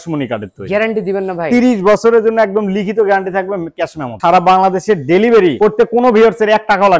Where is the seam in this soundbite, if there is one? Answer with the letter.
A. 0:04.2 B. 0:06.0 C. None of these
A